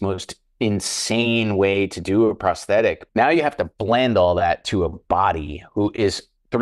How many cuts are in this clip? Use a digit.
1